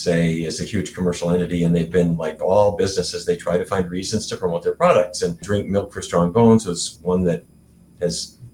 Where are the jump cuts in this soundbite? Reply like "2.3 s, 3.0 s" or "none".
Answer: 2.4 s, 5.5 s, 6.9 s